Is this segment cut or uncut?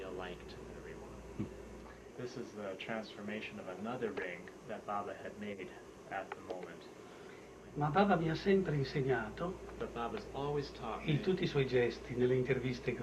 cut